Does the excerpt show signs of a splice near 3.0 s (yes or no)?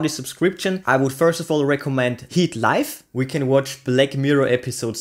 yes